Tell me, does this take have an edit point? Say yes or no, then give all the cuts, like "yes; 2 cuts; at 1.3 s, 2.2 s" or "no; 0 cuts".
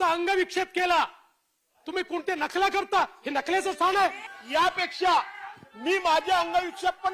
yes; 1 cut; at 4.3 s